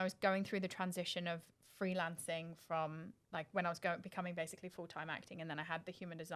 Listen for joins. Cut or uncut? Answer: uncut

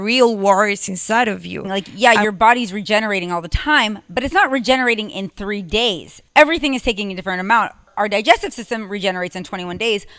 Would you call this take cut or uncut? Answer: cut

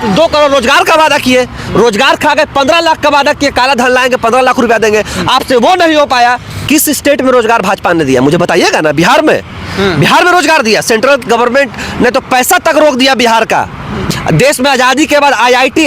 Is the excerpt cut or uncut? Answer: cut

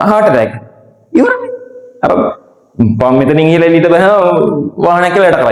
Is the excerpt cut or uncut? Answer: uncut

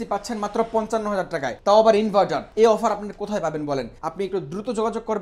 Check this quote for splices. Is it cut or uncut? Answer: cut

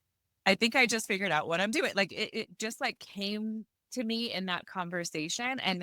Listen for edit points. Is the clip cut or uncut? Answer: cut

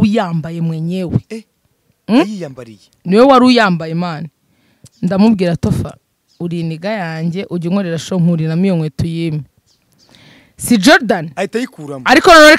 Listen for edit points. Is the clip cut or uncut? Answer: uncut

